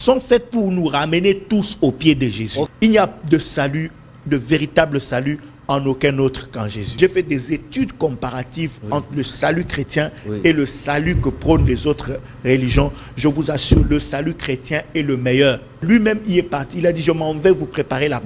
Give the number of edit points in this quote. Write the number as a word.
three